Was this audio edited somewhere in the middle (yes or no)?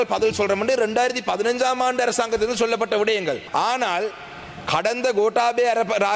no